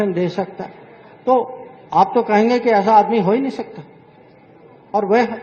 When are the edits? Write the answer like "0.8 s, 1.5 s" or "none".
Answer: none

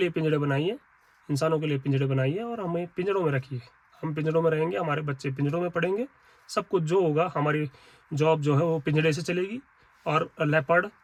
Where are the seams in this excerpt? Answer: none

